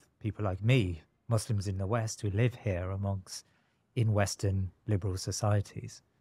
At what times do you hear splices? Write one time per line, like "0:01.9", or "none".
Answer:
none